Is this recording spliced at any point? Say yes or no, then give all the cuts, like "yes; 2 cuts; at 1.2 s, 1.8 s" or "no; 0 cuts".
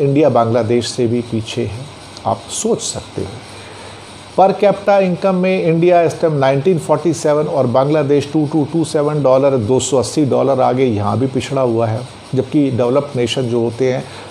no; 0 cuts